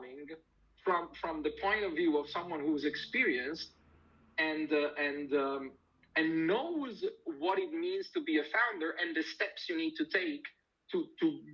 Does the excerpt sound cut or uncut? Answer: uncut